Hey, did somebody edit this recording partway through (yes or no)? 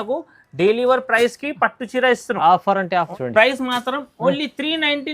yes